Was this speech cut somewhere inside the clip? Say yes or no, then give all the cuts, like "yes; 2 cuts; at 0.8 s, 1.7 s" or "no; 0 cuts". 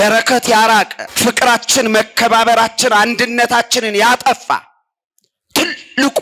yes; 1 cut; at 1.0 s